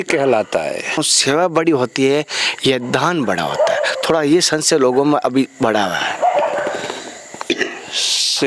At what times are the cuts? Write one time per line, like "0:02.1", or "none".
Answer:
0:01.0